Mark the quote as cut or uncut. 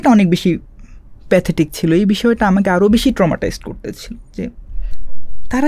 uncut